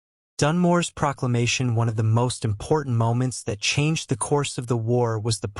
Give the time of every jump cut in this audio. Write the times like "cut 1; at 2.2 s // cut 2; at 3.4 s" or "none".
none